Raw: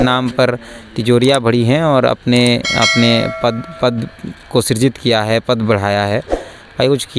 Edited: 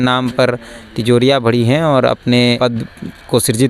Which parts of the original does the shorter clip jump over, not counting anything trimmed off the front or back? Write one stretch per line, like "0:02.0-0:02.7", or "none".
0:02.6-0:03.8